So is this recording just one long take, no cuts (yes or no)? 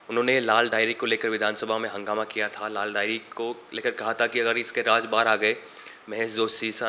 yes